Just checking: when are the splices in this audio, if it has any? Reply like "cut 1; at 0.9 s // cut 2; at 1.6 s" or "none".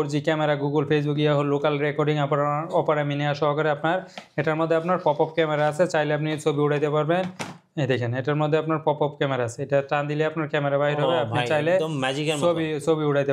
none